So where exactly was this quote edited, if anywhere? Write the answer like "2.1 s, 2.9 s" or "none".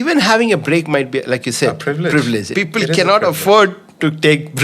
2.5 s